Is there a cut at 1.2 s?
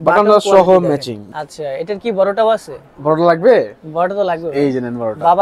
yes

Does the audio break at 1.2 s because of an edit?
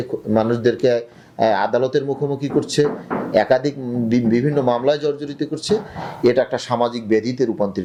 no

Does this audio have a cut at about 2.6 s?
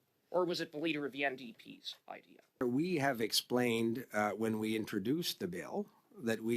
yes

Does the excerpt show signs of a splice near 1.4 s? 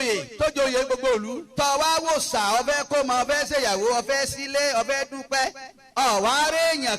yes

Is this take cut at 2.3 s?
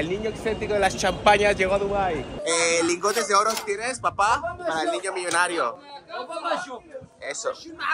yes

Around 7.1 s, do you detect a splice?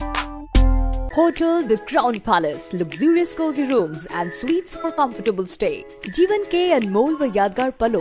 no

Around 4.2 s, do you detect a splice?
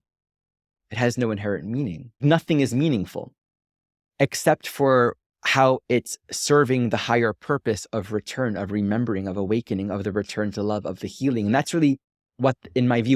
no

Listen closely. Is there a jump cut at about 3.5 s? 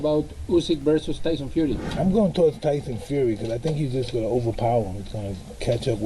no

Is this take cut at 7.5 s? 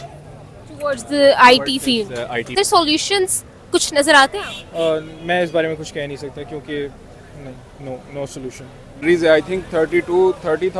no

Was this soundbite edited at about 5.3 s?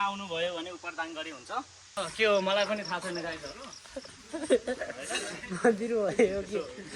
no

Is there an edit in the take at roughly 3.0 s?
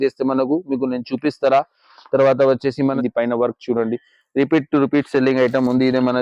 yes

